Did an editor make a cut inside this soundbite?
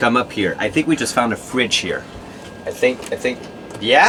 no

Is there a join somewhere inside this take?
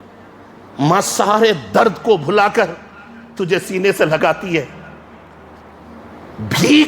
yes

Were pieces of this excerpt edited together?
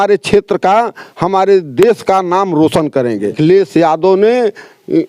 yes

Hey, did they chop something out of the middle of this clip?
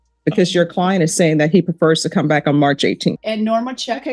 yes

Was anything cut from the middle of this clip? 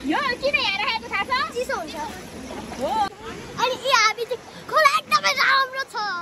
yes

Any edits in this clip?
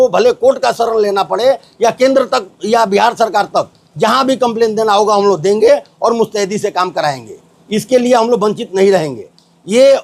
no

